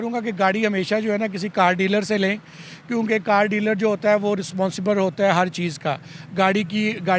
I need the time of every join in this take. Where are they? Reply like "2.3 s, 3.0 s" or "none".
none